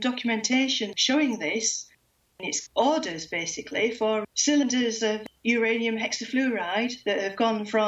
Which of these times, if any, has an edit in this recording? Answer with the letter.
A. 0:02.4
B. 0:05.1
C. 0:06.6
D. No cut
A